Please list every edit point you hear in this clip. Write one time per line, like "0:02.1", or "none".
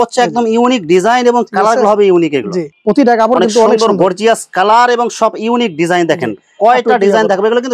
none